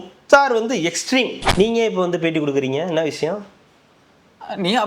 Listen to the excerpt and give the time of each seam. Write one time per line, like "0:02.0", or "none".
0:01.4